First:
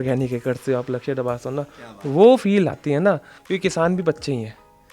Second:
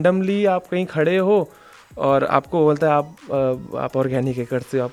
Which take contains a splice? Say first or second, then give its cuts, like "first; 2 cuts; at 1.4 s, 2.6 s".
first; 1 cut; at 3.4 s